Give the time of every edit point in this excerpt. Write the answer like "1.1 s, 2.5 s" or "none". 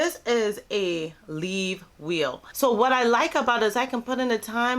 2.5 s